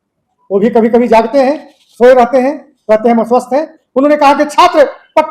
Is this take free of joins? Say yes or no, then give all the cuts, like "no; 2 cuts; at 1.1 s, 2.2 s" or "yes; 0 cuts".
no; 1 cut; at 3.8 s